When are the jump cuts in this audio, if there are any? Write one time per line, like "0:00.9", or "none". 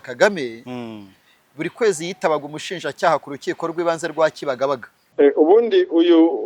0:05.0